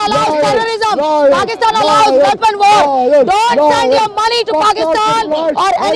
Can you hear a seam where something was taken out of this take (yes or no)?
no